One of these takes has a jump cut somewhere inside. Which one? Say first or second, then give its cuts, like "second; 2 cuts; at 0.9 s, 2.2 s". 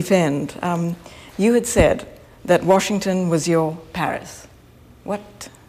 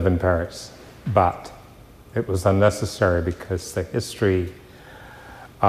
second; 1 cut; at 4.1 s